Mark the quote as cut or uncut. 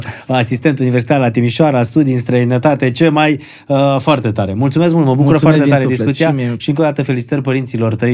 uncut